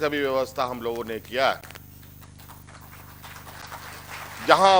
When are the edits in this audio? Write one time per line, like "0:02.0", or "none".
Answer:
none